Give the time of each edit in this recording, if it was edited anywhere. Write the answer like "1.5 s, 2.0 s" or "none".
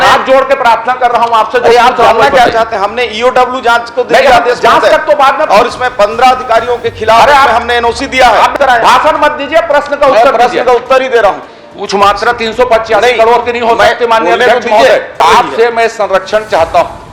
8.5 s, 11.5 s, 15.2 s